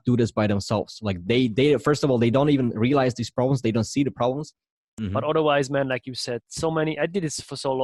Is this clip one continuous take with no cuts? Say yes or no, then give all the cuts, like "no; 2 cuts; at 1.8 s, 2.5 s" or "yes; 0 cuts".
no; 1 cut; at 5.0 s